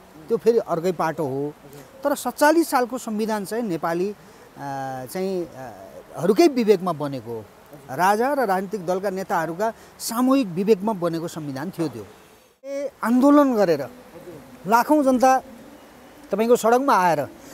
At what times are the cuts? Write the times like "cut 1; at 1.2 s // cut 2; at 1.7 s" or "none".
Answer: cut 1; at 12.9 s